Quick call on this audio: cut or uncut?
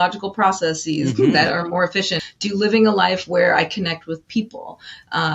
cut